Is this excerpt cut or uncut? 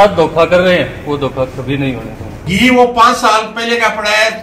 cut